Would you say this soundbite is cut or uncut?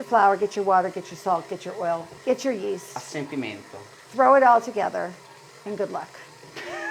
uncut